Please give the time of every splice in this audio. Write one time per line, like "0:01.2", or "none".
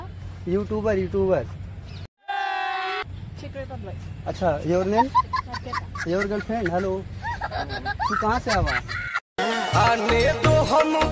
0:03.0